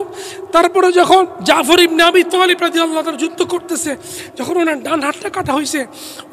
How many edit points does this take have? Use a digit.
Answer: 1